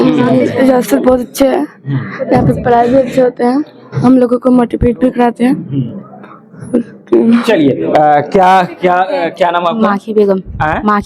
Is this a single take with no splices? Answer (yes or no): yes